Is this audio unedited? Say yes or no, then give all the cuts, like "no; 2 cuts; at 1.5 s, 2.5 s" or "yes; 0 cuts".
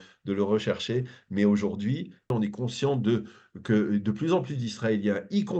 no; 1 cut; at 2.3 s